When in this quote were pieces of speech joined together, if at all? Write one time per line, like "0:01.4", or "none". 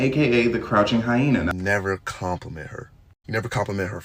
0:01.5

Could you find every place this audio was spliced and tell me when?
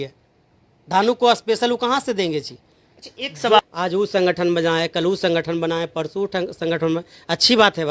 0:03.6

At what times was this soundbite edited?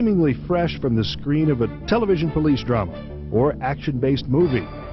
0:03.5

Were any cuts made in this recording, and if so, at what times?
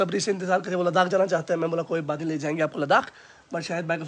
none

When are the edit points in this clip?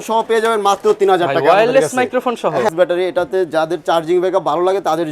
0:02.7

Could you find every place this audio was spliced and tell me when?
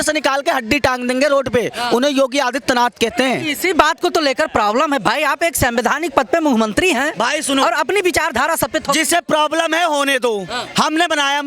none

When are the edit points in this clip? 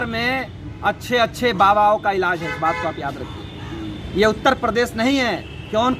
none

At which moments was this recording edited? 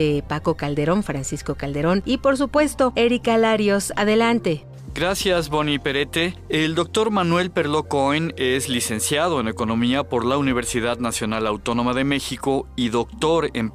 0:02.4

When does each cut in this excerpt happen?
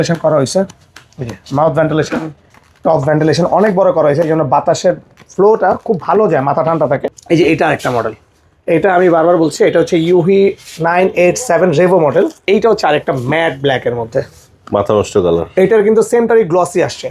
0:07.1
0:12.4

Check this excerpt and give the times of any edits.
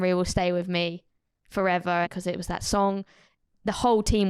0:02.1

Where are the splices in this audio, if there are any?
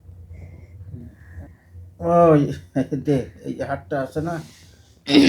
0:01.6

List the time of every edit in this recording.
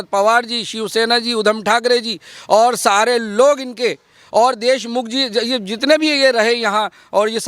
none

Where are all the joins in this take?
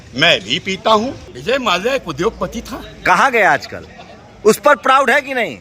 0:01.3

